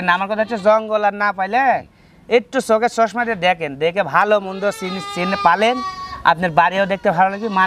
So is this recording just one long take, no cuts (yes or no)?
yes